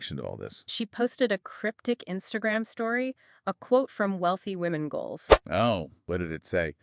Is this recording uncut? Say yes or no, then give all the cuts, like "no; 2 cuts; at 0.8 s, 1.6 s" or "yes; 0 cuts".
yes; 0 cuts